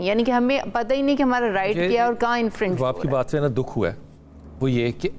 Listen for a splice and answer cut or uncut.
uncut